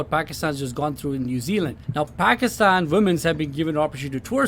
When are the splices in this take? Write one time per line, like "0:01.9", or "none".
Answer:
0:01.8